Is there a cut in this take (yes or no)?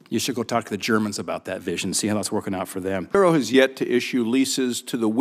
no